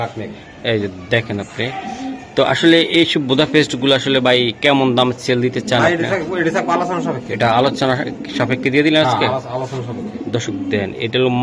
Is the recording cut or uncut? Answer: uncut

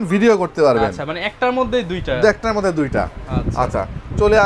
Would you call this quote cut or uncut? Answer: uncut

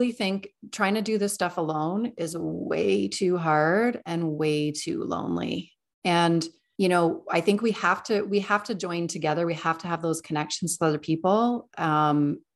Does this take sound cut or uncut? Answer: uncut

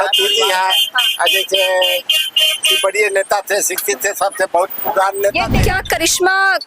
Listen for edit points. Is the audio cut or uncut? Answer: cut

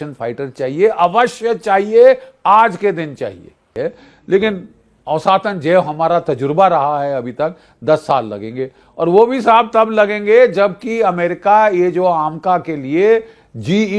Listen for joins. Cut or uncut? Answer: cut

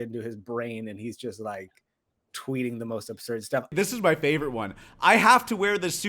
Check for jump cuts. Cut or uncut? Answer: cut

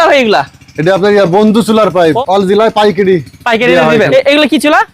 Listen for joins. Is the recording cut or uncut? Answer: cut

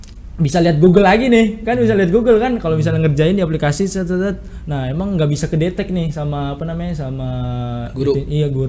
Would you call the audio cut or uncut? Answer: uncut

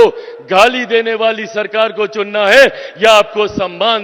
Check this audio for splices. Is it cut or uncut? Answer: uncut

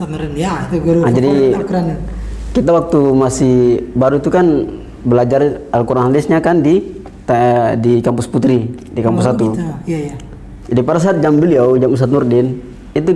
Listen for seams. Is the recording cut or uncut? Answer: uncut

